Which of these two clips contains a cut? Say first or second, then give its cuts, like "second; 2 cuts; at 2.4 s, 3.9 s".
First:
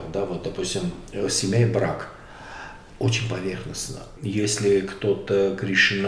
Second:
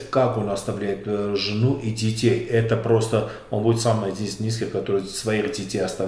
first; 1 cut; at 4.1 s